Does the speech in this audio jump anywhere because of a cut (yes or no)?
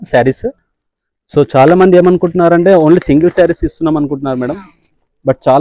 no